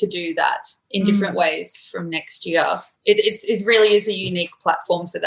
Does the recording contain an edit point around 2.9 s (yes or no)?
yes